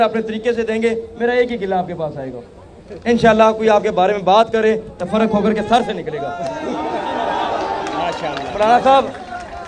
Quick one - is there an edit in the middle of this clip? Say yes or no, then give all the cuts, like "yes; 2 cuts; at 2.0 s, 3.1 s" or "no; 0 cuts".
no; 0 cuts